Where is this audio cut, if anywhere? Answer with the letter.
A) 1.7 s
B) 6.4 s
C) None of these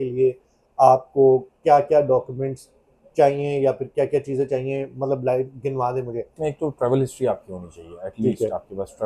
B